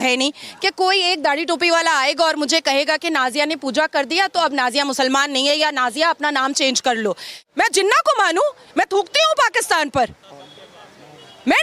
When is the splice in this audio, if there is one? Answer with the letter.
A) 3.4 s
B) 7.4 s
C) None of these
B